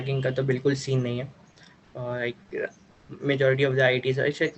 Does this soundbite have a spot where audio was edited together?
no; 0 cuts

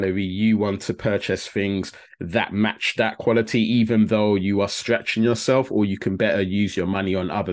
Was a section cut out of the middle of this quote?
no; 0 cuts

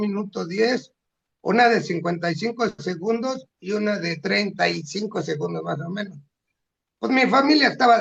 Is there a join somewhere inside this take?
no; 0 cuts

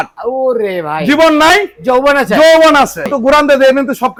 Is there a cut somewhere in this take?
no; 0 cuts

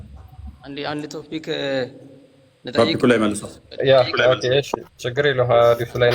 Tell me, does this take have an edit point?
no; 0 cuts

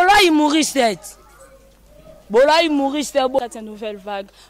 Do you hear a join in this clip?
yes; 1 cut; at 3.4 s

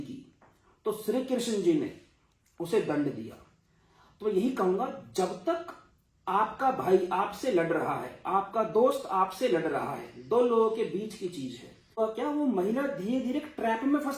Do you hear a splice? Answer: yes; 1 cut; at 12.0 s

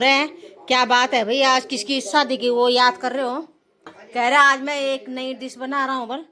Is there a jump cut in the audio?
no; 0 cuts

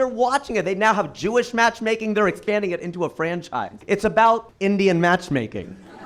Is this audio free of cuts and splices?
no; 2 cuts; at 3.8 s, 4.5 s

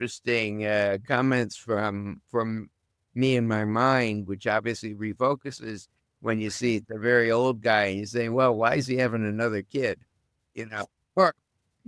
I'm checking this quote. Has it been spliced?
no; 0 cuts

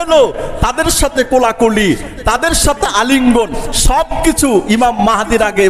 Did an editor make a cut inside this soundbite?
no; 0 cuts

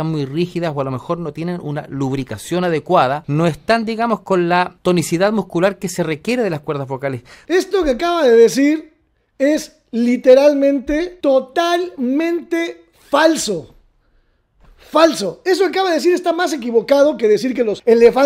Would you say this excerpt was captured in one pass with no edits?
no; 4 cuts; at 3.2 s, 4.7 s, 7.3 s, 11.1 s

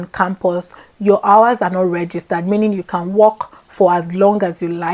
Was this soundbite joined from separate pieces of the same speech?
no; 0 cuts

